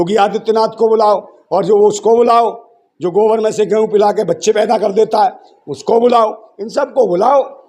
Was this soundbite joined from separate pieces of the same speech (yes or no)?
no